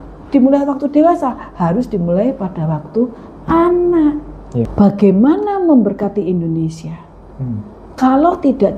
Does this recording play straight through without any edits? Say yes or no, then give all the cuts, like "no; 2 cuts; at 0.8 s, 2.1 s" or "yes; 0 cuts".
no; 1 cut; at 4.7 s